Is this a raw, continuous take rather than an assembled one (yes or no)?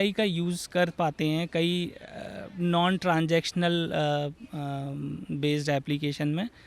yes